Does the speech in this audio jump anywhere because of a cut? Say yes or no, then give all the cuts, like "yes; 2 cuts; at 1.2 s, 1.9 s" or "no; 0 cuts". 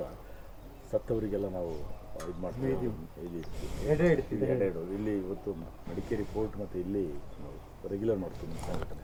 no; 0 cuts